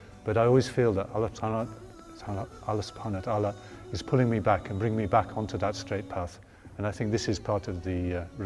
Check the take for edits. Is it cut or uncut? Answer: uncut